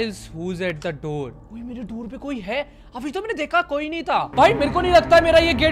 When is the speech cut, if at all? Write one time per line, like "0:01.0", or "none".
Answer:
0:01.4
0:04.3

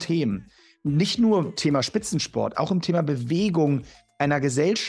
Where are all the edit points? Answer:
0:01.5

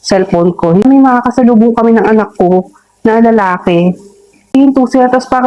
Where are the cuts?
0:00.8
0:04.5

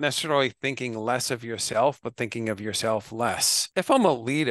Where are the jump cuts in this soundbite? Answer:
0:03.6

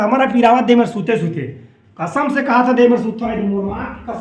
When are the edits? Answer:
none

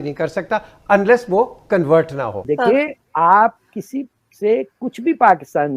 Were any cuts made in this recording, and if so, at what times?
0:02.4

